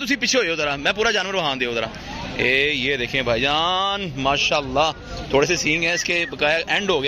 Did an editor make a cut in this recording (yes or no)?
no